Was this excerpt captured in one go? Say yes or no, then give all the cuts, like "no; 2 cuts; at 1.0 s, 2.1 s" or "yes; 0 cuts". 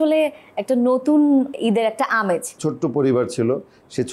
no; 2 cuts; at 1.5 s, 2.5 s